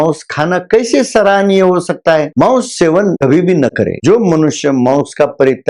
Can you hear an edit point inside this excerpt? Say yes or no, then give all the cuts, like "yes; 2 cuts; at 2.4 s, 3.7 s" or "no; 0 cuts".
yes; 1 cut; at 4.0 s